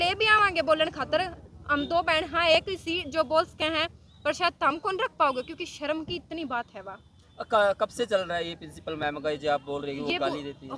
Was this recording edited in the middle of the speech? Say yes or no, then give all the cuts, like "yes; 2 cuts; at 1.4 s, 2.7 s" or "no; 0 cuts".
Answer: no; 0 cuts